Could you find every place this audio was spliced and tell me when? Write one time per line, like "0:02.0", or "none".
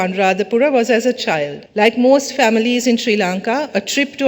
0:01.6